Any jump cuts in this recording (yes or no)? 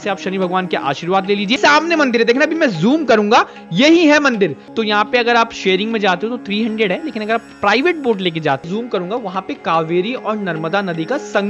yes